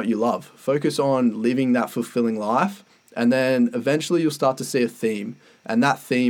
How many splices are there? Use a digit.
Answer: 0